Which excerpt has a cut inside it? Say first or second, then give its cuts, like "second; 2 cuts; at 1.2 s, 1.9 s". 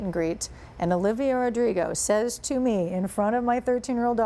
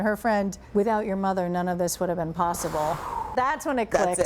second; 1 cut; at 3.3 s